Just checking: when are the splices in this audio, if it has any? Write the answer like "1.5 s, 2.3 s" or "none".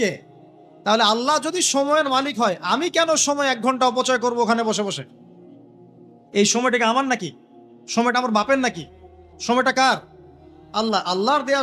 none